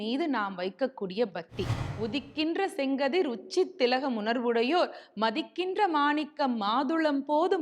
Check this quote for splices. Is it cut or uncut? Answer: cut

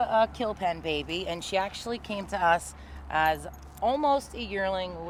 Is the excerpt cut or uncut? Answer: uncut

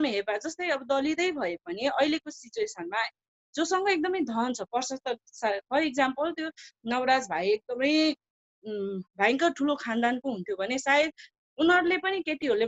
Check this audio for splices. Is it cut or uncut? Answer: uncut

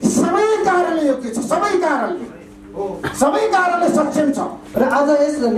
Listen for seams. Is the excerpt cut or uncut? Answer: cut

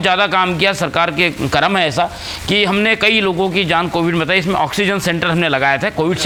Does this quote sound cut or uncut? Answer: uncut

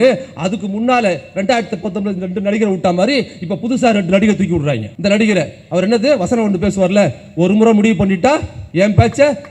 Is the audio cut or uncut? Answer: cut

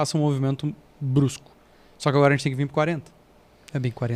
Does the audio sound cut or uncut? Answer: uncut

